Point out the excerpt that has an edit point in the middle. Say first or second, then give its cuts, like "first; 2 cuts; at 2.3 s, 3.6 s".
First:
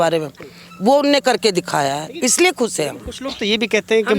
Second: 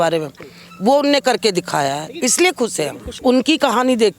second; 1 cut; at 3.2 s